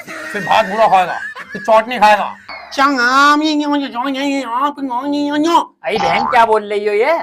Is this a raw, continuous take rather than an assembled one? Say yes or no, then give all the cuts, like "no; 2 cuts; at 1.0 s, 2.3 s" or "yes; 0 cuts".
no; 1 cut; at 2.6 s